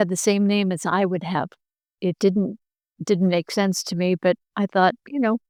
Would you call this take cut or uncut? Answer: uncut